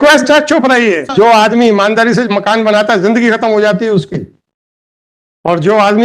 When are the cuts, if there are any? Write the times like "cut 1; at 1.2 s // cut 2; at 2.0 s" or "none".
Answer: cut 1; at 1.1 s